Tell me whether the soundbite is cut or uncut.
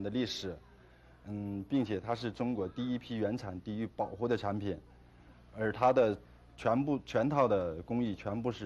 uncut